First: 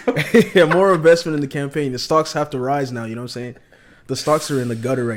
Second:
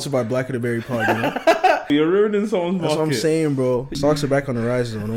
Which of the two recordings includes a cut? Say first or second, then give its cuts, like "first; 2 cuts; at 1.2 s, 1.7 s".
second; 2 cuts; at 1.9 s, 3.9 s